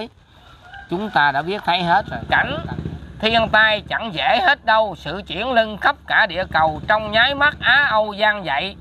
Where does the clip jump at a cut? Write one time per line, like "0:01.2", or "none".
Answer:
0:02.2

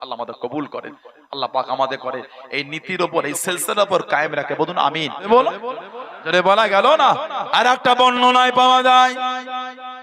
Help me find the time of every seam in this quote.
0:05.3

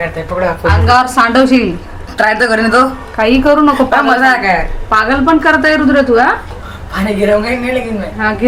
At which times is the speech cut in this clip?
0:06.5

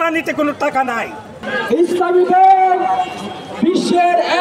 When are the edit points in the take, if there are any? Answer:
0:01.5

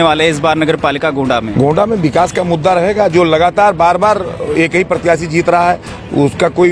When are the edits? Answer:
0:01.5

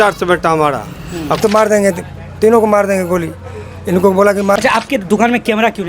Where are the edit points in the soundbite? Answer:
0:01.4
0:04.6

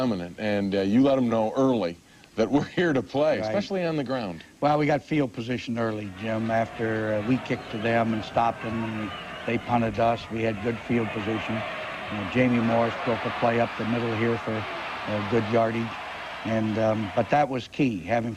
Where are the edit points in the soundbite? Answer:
0:02.9

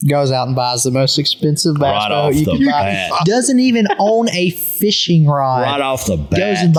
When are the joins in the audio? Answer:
none

